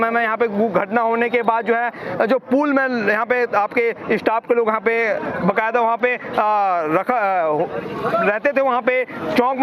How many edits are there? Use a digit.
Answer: 0